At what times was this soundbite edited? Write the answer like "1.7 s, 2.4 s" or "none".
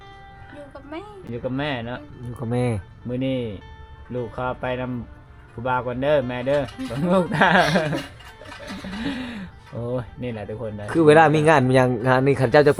none